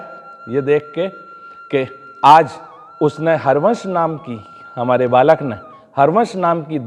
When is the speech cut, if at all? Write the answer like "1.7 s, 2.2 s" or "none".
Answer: none